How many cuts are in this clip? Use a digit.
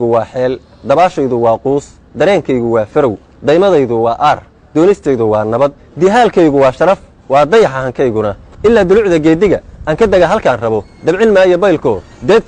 0